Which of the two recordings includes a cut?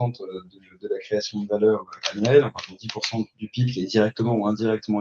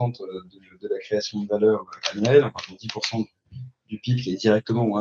first; 1 cut; at 3.4 s

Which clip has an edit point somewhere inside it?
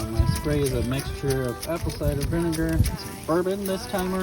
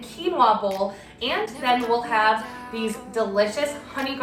first; 1 cut; at 2.9 s

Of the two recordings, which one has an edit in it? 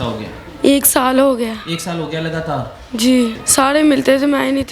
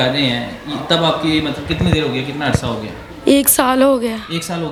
first; 1 cut; at 3.3 s

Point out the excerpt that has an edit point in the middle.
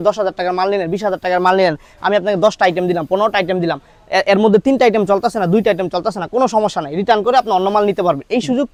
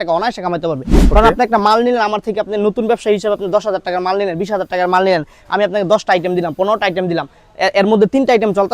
second; 1 cut; at 0.9 s

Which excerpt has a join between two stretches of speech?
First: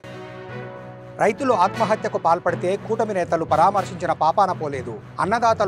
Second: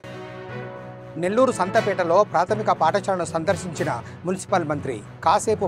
second; 1 cut; at 0.9 s

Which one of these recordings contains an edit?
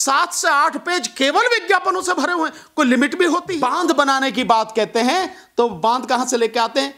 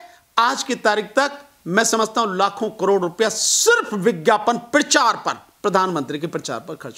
first; 1 cut; at 3.5 s

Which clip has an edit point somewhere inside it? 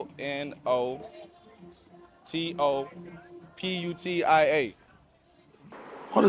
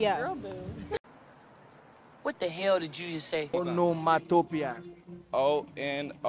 second; 1 cut; at 3.5 s

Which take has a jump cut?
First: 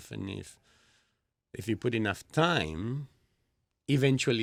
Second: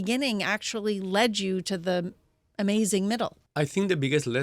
second; 1 cut; at 3.4 s

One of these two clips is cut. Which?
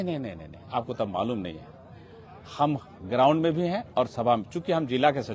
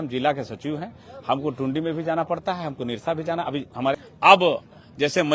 second; 1 cut; at 3.9 s

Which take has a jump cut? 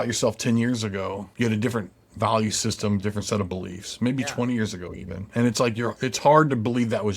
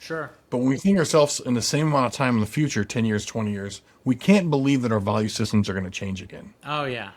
first; 1 cut; at 1.2 s

